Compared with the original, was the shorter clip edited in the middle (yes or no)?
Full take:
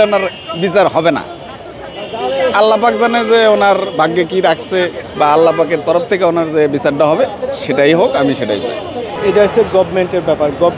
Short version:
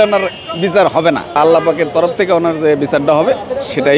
yes